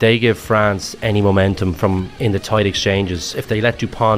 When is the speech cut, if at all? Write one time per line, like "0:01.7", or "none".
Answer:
0:02.1
0:03.2